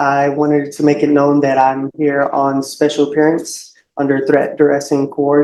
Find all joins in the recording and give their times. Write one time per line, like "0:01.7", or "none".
none